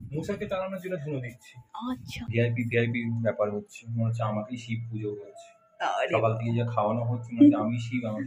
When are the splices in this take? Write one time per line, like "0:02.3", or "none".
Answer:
0:02.3